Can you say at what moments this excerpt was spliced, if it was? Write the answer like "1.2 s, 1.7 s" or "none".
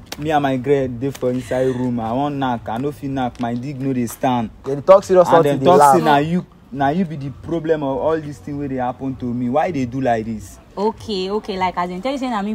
none